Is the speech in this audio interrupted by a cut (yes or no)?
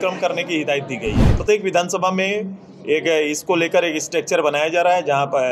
yes